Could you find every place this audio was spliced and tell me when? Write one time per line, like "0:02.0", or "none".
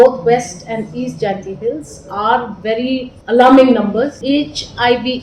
0:03.1
0:04.2